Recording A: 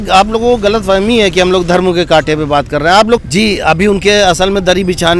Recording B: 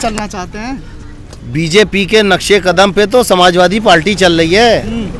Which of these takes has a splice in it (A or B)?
A